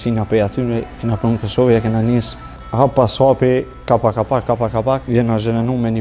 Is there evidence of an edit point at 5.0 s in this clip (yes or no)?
yes